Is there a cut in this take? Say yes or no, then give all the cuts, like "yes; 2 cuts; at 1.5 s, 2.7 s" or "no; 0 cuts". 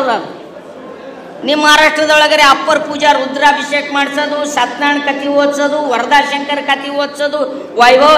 no; 0 cuts